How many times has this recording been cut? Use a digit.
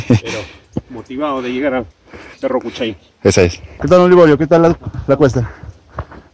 1